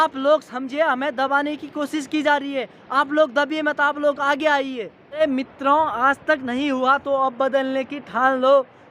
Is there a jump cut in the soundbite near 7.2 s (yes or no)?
no